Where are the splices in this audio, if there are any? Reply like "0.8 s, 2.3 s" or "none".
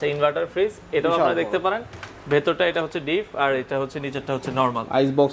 none